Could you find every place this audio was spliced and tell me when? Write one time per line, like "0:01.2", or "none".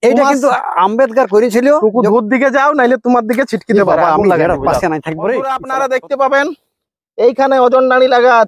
0:05.6